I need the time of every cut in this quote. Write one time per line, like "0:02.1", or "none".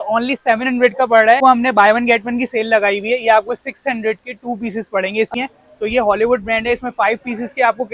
0:01.4
0:05.3